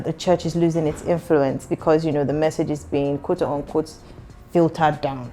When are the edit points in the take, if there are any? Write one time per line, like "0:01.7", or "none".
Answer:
none